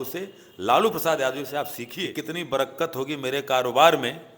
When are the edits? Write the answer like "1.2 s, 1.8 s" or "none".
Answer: 1.9 s